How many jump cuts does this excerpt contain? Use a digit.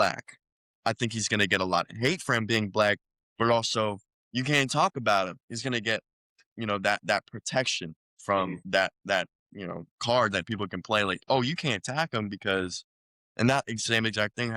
2